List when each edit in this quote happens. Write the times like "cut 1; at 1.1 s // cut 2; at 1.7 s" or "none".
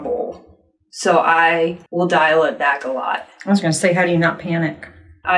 none